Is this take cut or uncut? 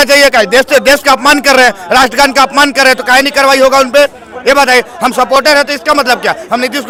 uncut